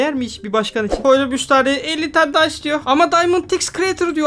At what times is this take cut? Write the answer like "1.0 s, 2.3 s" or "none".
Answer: 1.0 s